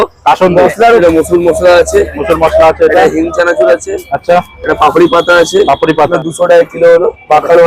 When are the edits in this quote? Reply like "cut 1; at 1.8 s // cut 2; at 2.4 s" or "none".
cut 1; at 1.0 s // cut 2; at 6.1 s